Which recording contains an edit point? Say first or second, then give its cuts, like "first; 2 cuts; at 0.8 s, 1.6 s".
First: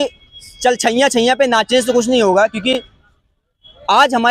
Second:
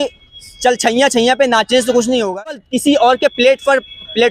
second; 1 cut; at 2.6 s